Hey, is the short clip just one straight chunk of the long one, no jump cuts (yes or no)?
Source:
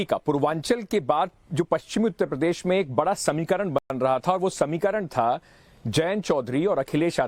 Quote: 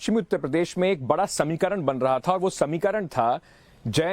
no